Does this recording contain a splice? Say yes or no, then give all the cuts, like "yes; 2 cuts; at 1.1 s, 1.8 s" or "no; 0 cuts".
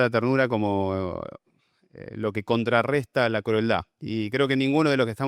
no; 0 cuts